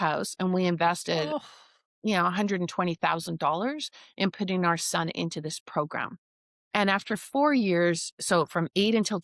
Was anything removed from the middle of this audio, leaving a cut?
no; 0 cuts

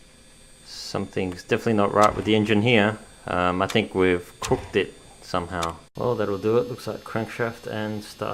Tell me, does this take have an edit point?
yes; 1 cut; at 5.8 s

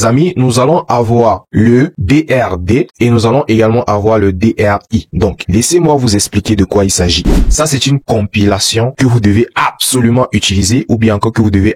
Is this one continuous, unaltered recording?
no; 2 cuts; at 5.1 s, 7.4 s

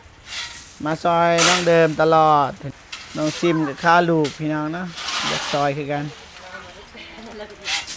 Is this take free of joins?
no; 1 cut; at 2.6 s

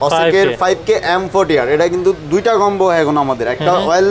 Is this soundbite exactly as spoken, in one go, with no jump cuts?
yes; 0 cuts

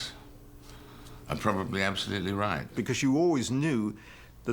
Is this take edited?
yes; 1 cut; at 2.7 s

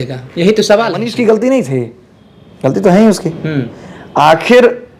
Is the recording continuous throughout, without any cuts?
no; 1 cut; at 1.1 s

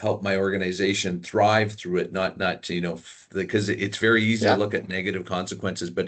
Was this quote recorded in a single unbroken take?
no; 1 cut; at 3.2 s

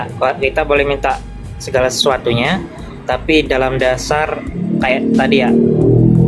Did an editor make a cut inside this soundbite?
no; 0 cuts

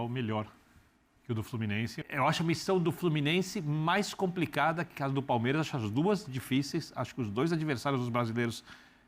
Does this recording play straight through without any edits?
no; 1 cut; at 2.0 s

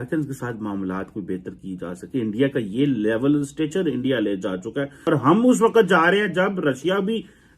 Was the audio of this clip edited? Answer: yes; 1 cut; at 5.0 s

